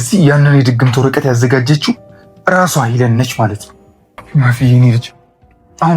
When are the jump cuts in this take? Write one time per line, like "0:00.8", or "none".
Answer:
0:04.2